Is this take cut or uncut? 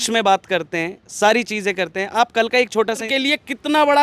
cut